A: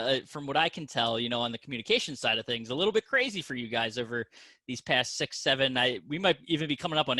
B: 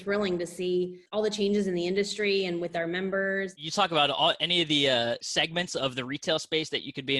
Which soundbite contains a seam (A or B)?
B